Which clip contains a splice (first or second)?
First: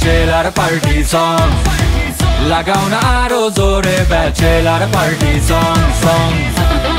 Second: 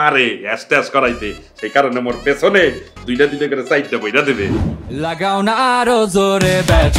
second